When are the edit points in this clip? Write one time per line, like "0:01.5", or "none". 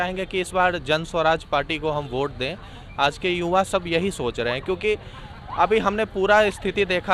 none